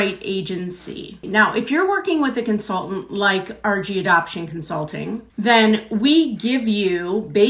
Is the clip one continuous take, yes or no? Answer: no